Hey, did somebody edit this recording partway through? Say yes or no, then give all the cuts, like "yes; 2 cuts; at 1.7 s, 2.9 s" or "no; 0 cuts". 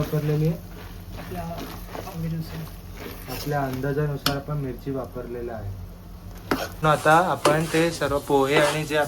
yes; 1 cut; at 6.7 s